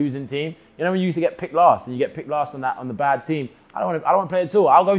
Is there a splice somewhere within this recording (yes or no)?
no